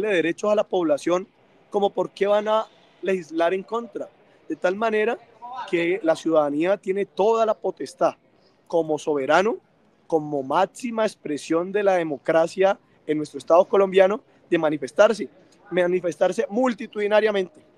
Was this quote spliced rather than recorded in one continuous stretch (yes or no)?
no